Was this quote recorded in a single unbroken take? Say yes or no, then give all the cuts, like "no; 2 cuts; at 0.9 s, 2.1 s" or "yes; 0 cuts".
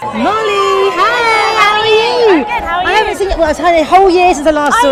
yes; 0 cuts